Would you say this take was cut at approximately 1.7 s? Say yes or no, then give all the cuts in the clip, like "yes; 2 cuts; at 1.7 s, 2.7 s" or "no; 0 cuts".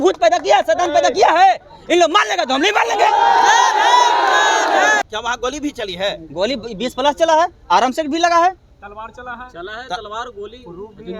no; 1 cut; at 5.0 s